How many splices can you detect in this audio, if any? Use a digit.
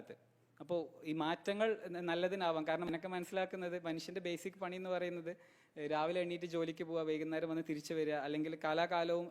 1